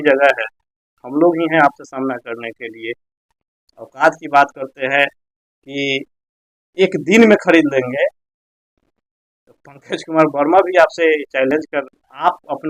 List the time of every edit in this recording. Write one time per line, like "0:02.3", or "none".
none